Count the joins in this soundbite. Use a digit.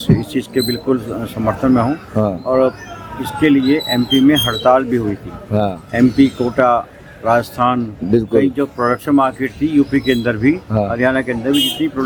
0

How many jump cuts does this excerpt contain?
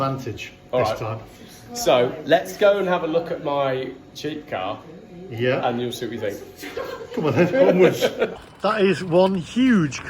1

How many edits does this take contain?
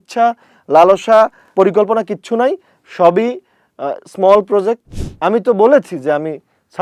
2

